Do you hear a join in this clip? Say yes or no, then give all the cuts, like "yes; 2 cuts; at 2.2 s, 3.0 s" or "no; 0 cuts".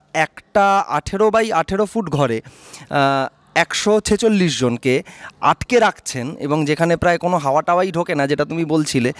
no; 0 cuts